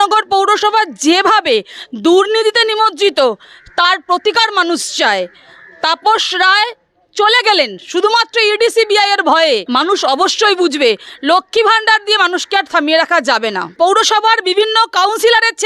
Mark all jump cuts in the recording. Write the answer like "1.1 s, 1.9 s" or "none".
9.7 s, 13.7 s